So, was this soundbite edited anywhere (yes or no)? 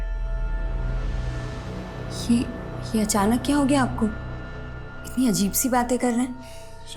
no